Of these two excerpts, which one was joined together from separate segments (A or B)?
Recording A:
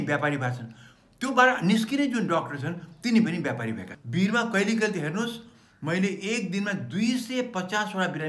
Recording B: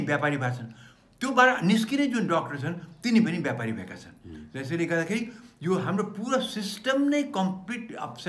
A